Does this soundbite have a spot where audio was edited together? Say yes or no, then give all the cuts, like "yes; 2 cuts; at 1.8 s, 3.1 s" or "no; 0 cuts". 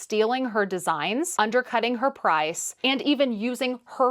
yes; 1 cut; at 1.3 s